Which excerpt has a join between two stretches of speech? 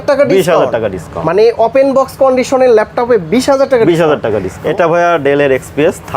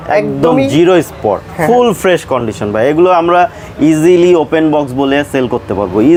first; 1 cut; at 4.5 s

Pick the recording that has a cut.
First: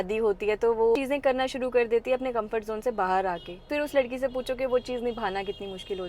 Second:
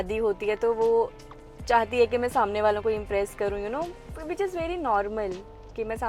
first; 2 cuts; at 1.0 s, 3.7 s

